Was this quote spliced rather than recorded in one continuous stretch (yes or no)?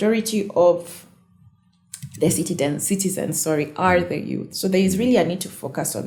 no